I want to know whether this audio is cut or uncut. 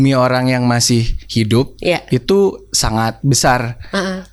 uncut